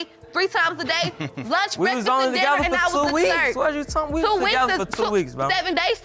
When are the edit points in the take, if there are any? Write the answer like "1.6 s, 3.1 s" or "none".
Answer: none